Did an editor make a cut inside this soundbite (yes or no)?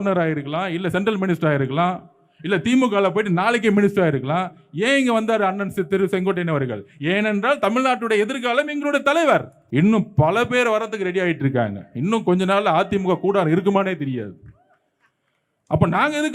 yes